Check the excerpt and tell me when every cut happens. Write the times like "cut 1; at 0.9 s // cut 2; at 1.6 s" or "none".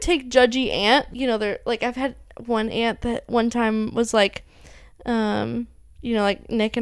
cut 1; at 1.1 s